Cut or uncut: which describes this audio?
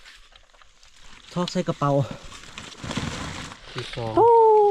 cut